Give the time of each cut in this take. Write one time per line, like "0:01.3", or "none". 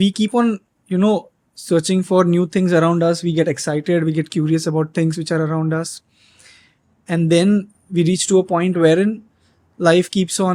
none